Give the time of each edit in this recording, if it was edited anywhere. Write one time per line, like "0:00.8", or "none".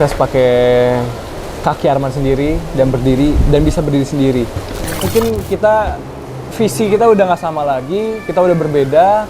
0:05.1